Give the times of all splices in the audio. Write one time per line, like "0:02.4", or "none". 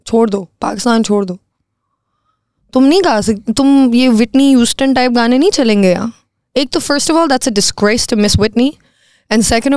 none